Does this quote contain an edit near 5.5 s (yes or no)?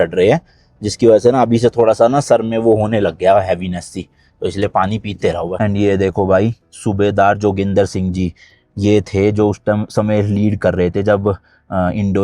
yes